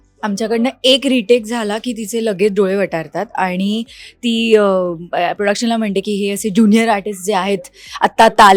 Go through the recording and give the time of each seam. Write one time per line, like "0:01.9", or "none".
none

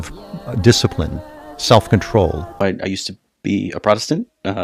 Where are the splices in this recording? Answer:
0:02.5

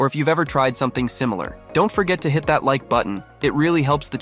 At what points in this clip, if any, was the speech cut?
0:01.5
0:03.2

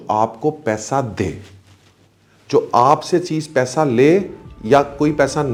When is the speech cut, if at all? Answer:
none

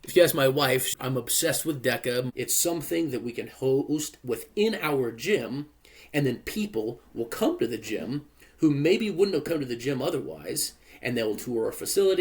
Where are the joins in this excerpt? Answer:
0:00.9
0:02.3

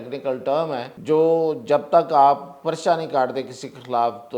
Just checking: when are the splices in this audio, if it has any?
0:00.9

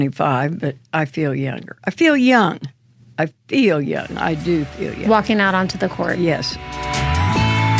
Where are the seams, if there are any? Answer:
0:06.8

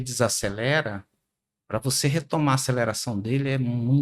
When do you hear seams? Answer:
none

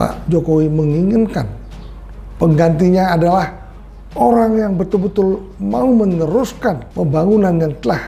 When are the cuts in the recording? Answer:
0:06.9

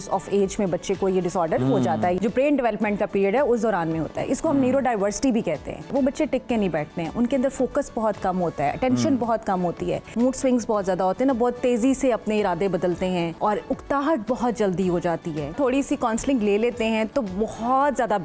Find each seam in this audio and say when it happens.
0:02.2
0:05.8
0:10.0
0:13.3
0:15.5

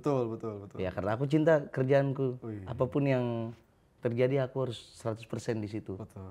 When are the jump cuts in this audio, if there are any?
none

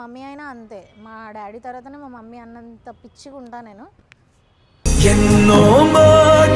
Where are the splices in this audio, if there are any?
none

